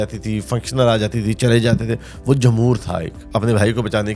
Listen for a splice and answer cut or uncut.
cut